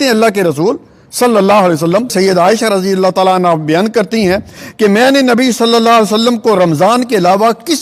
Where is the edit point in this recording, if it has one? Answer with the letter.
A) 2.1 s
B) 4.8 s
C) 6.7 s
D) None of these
A